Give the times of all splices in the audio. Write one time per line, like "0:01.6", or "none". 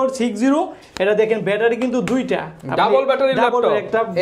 none